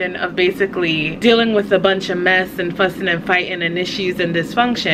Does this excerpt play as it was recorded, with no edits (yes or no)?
no